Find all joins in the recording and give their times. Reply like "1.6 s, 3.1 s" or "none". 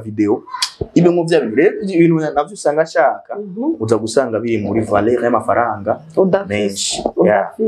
none